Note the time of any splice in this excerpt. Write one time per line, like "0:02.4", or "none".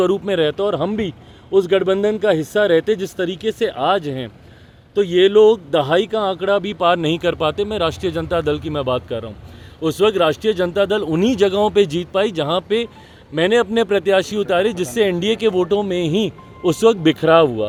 none

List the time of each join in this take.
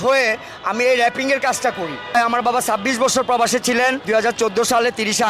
0:02.1
0:04.0

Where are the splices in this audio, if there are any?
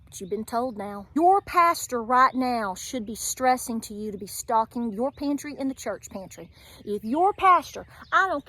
0:01.0

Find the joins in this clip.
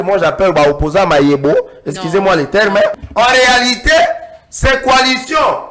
0:03.0

